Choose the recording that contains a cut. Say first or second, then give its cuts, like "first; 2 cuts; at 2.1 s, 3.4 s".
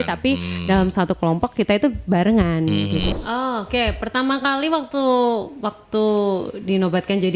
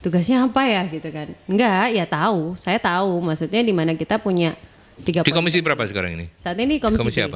first; 1 cut; at 3.1 s